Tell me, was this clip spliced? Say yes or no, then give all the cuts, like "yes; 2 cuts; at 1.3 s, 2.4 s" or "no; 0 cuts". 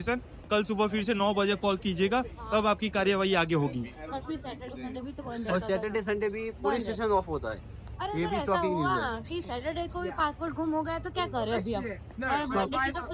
no; 0 cuts